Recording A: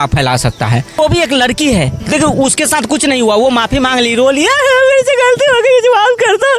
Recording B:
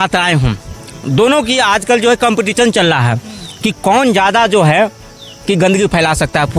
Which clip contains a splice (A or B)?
A